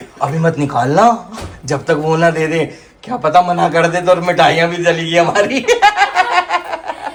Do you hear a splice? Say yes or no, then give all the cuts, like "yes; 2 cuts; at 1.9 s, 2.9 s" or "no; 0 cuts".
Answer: no; 0 cuts